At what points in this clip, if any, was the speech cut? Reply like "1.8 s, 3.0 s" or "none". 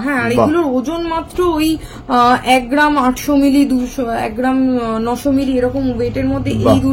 none